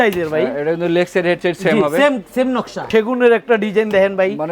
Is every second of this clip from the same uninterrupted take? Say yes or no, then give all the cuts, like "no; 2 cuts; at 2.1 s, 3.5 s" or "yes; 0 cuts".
no; 1 cut; at 2.9 s